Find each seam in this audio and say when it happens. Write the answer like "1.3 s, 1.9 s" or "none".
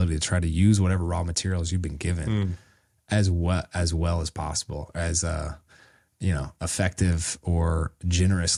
none